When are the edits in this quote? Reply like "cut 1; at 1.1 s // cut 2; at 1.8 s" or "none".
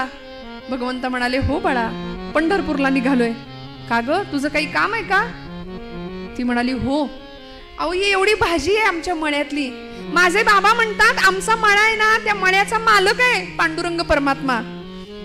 none